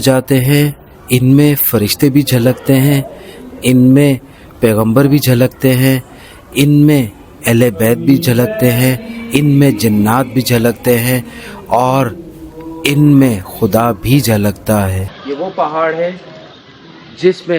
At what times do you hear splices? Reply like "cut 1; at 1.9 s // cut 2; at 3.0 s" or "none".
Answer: cut 1; at 15.1 s